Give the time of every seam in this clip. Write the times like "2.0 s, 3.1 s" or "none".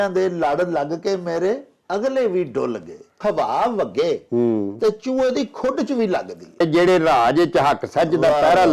3.2 s, 6.6 s